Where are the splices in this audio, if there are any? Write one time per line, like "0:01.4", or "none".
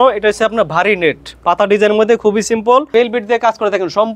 0:02.9